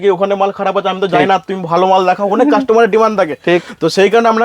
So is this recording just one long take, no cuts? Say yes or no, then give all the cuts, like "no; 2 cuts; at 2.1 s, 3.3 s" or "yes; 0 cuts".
yes; 0 cuts